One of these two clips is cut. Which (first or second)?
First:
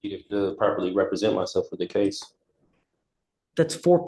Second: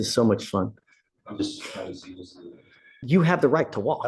second